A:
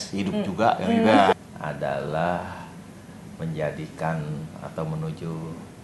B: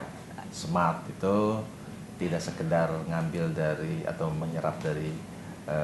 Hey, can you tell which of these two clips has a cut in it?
A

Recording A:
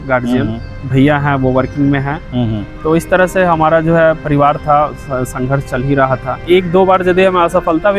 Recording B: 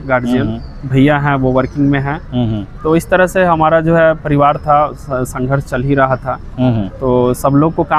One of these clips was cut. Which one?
A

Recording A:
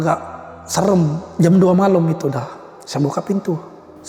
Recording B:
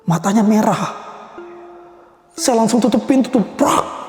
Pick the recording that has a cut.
A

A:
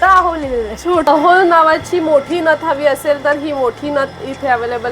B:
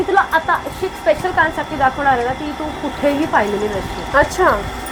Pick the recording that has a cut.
A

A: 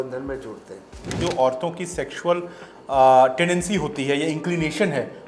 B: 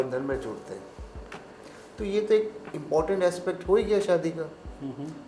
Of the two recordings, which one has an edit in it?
A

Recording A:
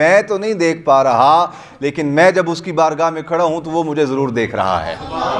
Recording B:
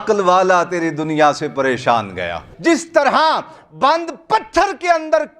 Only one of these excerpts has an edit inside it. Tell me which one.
B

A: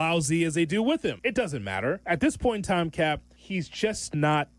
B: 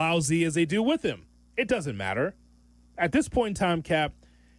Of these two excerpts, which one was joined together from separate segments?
A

